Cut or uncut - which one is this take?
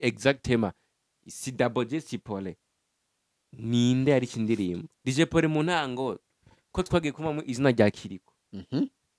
cut